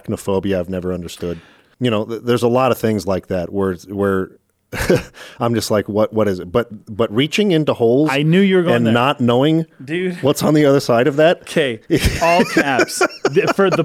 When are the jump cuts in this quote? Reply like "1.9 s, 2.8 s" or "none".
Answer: 1.6 s